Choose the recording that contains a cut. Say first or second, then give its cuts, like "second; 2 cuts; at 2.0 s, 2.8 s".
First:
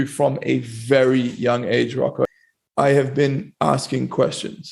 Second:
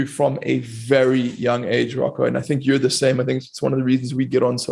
first; 1 cut; at 2.3 s